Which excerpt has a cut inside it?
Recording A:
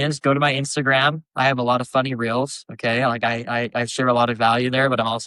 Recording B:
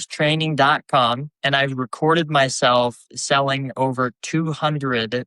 B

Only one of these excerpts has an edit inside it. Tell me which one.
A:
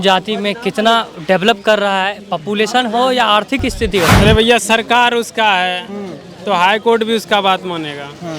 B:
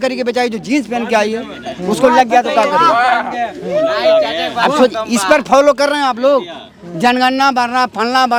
A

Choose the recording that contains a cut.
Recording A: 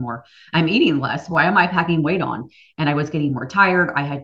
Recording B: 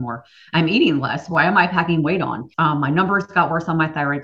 B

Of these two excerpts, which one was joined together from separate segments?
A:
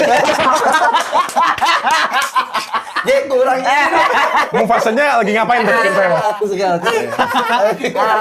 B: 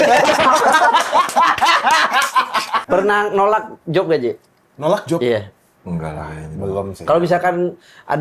B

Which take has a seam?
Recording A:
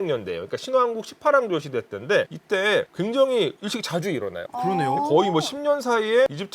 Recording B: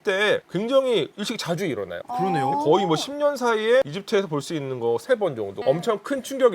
B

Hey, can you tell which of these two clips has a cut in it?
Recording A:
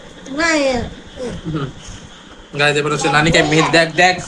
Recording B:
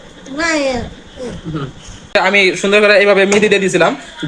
B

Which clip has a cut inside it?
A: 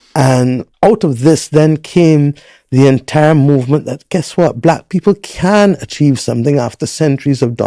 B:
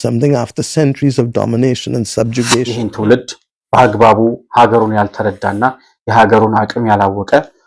B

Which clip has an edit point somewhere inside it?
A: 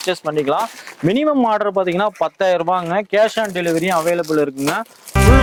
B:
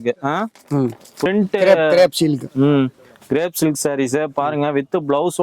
B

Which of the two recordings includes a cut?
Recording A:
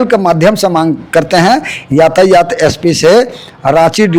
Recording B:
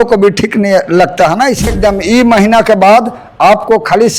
B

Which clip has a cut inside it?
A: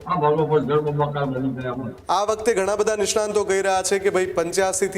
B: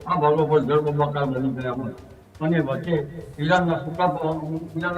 A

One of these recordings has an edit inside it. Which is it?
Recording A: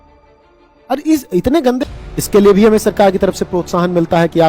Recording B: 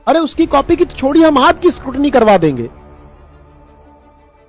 A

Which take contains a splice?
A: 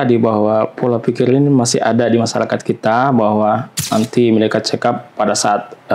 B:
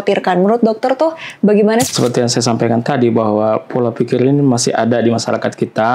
B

